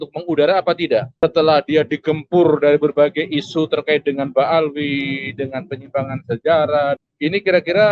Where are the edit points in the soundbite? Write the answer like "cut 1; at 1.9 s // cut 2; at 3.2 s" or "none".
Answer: cut 1; at 1.1 s